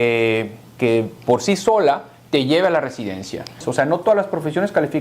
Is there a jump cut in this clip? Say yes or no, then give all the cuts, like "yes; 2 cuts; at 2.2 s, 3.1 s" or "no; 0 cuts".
yes; 1 cut; at 3.6 s